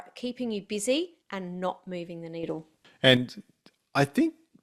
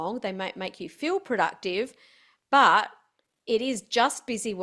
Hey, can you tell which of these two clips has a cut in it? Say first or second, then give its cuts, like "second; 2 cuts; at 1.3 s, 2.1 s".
first; 1 cut; at 2.8 s